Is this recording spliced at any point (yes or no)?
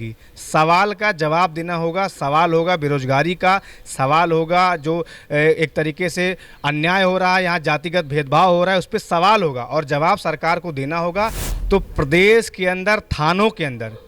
yes